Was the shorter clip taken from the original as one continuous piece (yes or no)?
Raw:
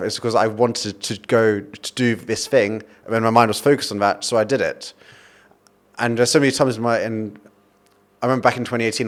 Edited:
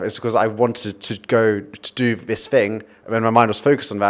yes